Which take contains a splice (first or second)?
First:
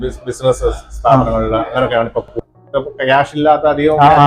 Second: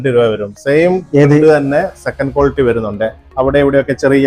first